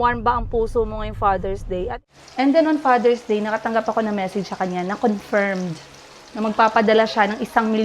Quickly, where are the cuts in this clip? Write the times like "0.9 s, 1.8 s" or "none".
2.0 s